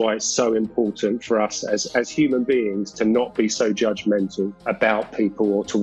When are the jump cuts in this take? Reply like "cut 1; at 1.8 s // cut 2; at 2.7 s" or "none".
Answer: cut 1; at 4.6 s